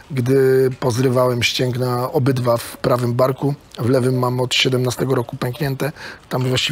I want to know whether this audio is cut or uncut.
uncut